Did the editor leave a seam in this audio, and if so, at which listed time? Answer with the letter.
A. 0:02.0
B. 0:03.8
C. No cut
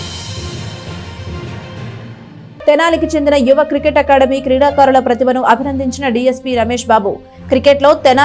A